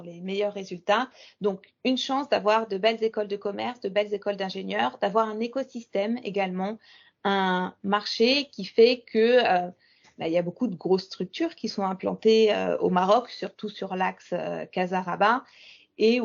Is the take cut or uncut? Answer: uncut